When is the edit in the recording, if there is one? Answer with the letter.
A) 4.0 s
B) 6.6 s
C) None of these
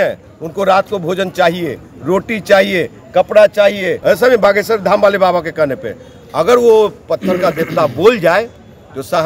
A